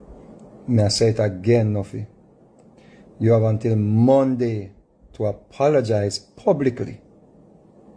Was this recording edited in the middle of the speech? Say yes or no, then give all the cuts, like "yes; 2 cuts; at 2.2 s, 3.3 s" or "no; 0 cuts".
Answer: no; 0 cuts